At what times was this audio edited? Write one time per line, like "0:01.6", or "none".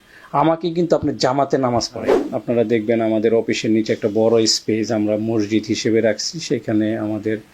0:02.2